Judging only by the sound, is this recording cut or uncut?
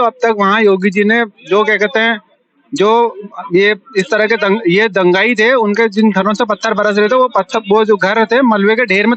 uncut